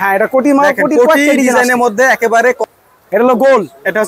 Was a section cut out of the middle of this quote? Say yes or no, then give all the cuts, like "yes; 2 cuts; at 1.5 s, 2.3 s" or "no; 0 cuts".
yes; 1 cut; at 2.6 s